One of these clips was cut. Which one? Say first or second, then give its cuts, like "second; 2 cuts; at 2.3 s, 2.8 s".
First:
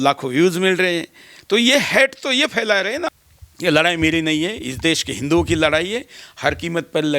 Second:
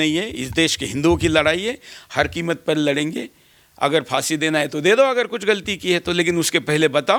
first; 1 cut; at 3.1 s